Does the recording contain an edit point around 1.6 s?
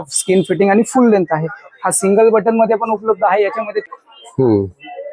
no; 1 cut; at 3.9 s

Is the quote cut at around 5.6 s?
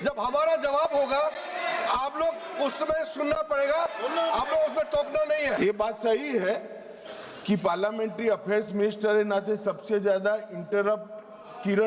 yes; 1 cut; at 5.6 s

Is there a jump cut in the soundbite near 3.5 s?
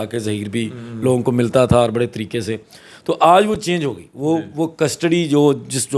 no; 0 cuts

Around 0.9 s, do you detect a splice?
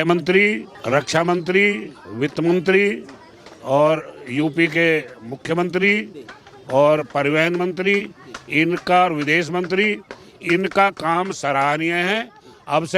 yes; 1 cut; at 0.9 s

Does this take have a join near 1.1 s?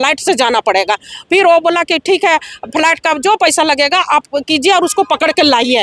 no; 0 cuts

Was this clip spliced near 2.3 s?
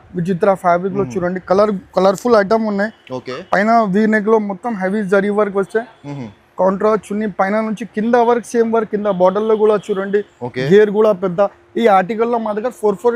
no; 0 cuts

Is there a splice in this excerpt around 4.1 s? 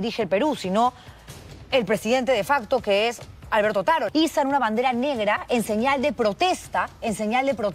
yes; 1 cut; at 4.1 s

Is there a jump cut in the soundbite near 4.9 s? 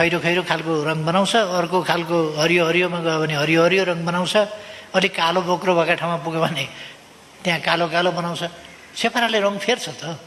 no; 0 cuts

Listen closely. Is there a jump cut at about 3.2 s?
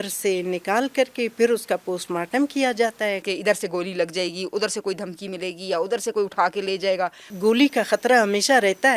yes; 2 cuts; at 3.2 s, 7.3 s

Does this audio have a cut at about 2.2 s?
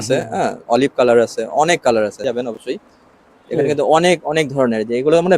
yes; 1 cut; at 2.2 s

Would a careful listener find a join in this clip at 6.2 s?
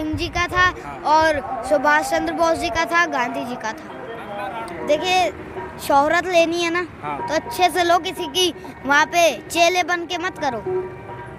no; 1 cut; at 4.7 s

